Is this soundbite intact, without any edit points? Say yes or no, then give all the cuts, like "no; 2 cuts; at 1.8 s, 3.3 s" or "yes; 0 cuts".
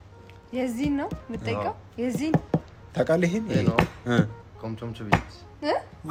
yes; 0 cuts